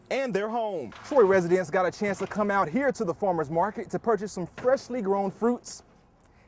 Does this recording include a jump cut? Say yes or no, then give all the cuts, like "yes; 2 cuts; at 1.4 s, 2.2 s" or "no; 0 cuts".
yes; 1 cut; at 0.9 s